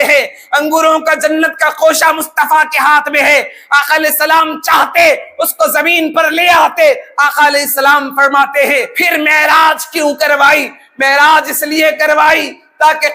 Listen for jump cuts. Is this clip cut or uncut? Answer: cut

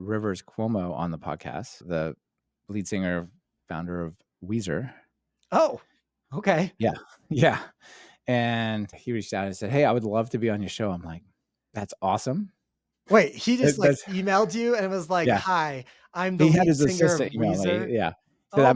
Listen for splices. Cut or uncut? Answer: uncut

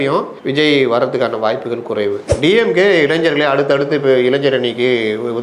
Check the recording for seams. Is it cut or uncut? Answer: cut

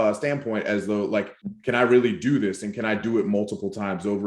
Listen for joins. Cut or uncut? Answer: cut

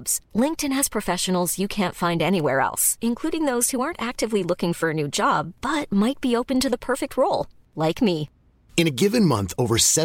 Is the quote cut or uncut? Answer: uncut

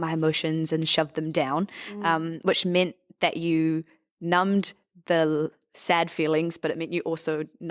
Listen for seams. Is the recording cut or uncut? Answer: uncut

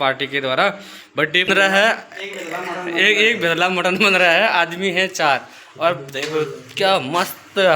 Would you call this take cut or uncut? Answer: cut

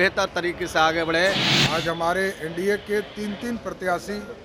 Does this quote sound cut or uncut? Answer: cut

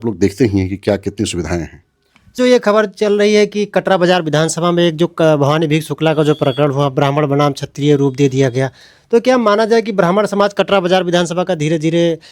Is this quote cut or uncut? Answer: cut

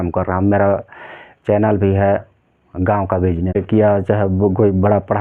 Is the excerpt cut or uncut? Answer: cut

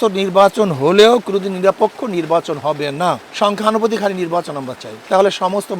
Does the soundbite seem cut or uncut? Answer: cut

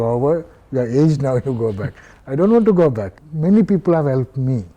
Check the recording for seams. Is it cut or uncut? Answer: cut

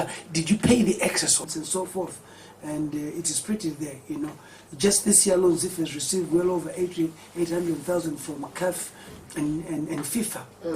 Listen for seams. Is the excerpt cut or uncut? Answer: cut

